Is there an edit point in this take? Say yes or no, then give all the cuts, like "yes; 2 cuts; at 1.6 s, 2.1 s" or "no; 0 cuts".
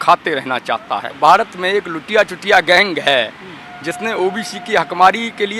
yes; 1 cut; at 1.1 s